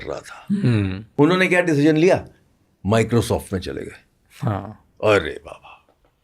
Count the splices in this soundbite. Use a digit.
1